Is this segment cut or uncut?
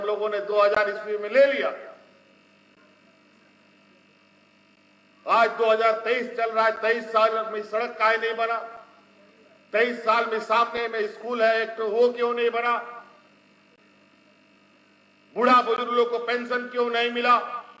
uncut